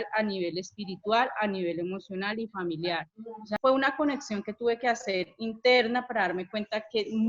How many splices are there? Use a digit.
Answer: 1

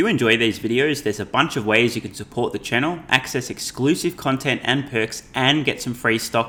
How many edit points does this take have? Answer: 0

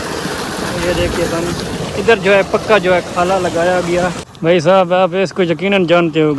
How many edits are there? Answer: 1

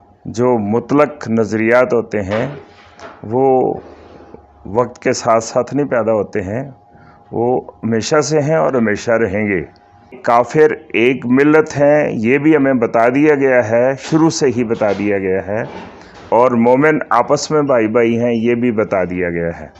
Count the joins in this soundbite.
2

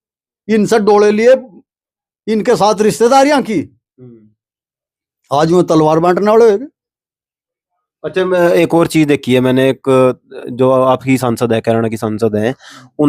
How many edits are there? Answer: 0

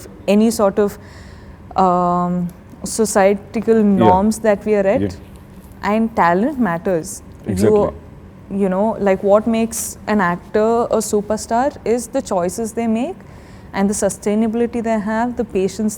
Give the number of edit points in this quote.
0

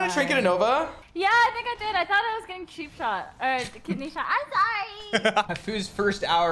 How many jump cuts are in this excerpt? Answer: 2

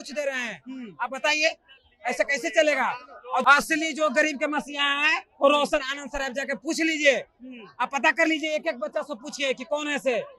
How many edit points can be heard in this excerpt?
1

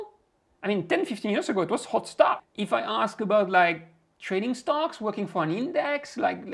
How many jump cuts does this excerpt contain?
1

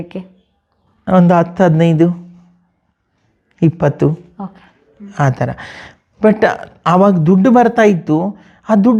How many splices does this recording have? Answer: 0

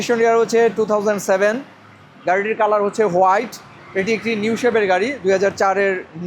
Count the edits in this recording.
0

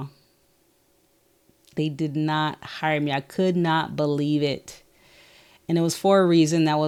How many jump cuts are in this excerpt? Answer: 0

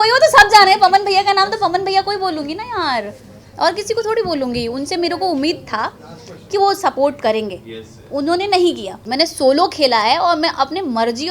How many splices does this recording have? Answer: 1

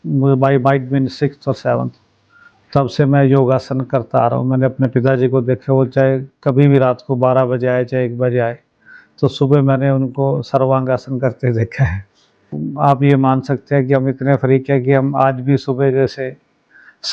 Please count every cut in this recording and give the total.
1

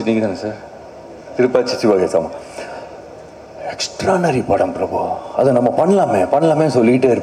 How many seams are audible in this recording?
0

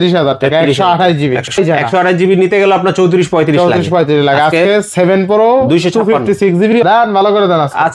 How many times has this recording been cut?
2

